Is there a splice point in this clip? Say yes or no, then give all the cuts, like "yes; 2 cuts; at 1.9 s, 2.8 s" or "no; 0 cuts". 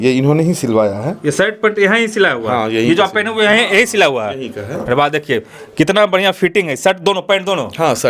no; 0 cuts